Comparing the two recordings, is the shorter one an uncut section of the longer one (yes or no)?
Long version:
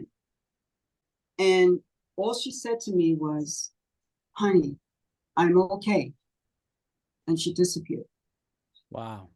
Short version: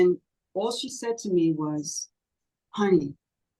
yes